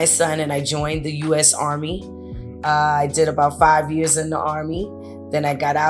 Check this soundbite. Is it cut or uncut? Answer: uncut